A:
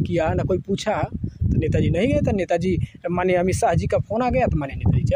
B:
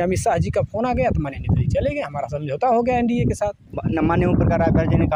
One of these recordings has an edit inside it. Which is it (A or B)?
B